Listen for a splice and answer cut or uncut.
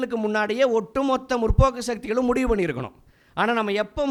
uncut